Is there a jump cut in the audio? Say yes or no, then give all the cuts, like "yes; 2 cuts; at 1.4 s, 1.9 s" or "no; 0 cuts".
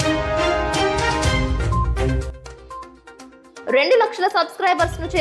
yes; 1 cut; at 2.8 s